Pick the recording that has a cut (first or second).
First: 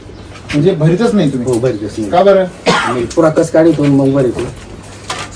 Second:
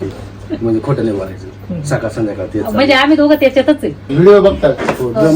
second